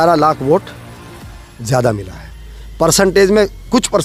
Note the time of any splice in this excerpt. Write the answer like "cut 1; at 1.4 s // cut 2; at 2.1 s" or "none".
none